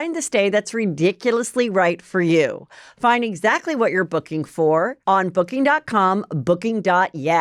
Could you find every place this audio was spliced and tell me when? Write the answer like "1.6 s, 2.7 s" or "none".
5.0 s